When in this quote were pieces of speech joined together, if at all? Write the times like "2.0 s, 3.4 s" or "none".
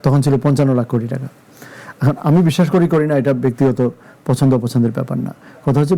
none